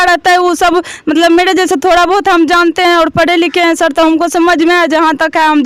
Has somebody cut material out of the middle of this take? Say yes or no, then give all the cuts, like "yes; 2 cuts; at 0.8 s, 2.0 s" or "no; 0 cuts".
no; 0 cuts